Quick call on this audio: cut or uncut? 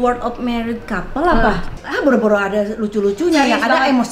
cut